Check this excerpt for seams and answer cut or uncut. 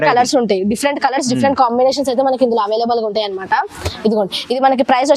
uncut